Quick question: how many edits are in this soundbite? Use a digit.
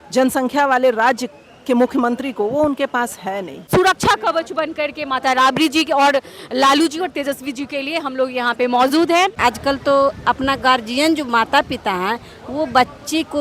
2